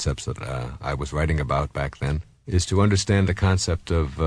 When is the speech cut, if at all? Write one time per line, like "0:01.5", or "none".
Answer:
none

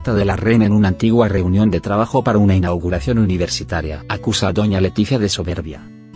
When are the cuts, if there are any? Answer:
0:01.9

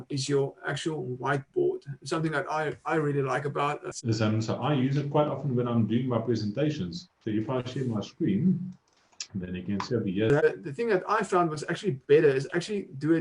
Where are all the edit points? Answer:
0:03.9
0:10.4

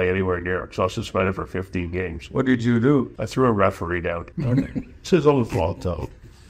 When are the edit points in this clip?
0:03.2
0:04.3

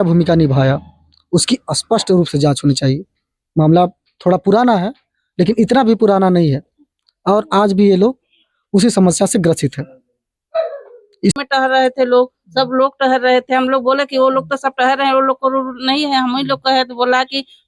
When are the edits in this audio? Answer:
0:11.4

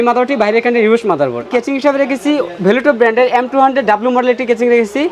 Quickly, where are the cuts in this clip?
0:01.5

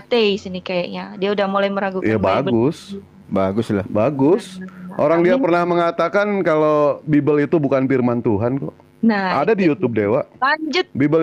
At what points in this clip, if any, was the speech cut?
none

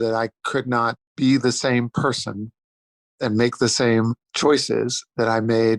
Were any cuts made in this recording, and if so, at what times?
0:01.0
0:04.2

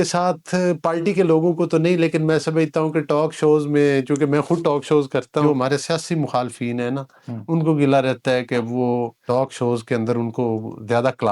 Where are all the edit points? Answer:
0:05.4
0:09.2

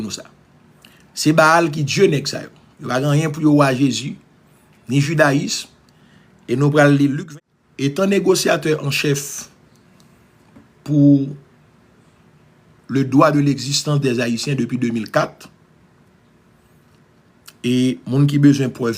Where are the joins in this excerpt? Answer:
0:07.2

